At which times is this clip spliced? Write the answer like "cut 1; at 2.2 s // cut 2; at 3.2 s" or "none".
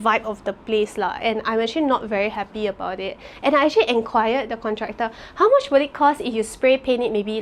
none